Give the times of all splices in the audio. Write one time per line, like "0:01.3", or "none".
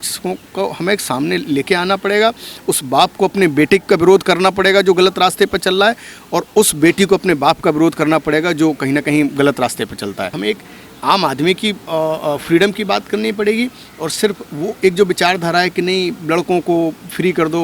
0:10.3